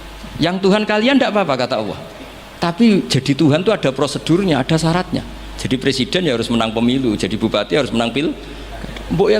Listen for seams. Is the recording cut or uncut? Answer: uncut